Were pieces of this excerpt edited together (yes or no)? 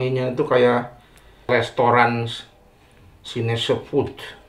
yes